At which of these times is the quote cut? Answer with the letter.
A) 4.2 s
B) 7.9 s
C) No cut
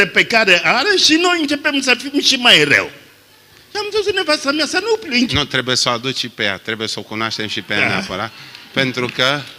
C